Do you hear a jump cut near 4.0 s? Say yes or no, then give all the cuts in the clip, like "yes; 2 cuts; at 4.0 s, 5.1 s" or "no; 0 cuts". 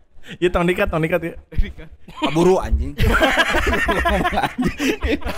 no; 0 cuts